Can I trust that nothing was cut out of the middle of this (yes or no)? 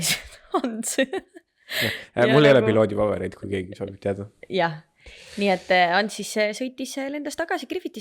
yes